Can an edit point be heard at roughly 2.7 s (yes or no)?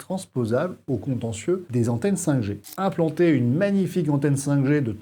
yes